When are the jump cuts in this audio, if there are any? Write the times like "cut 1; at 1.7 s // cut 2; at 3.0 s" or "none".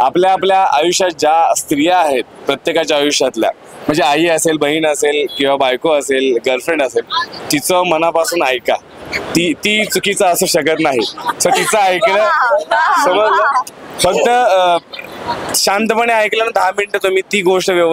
none